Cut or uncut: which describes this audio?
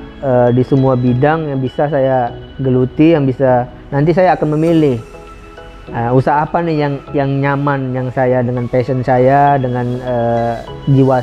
uncut